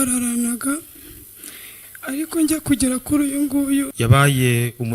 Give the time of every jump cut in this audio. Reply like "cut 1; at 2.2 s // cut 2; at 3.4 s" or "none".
cut 1; at 3.9 s